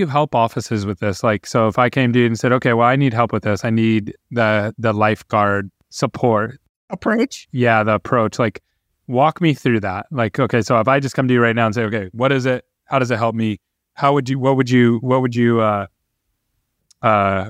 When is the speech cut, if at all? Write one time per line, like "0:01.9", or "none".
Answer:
none